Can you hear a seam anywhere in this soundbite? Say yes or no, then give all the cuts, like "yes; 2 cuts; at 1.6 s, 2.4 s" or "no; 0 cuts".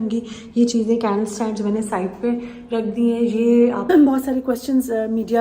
yes; 1 cut; at 3.9 s